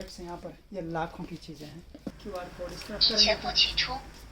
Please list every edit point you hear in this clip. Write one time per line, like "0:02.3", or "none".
0:02.1